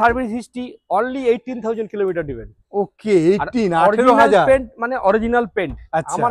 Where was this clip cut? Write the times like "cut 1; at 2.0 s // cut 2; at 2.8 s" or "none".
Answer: none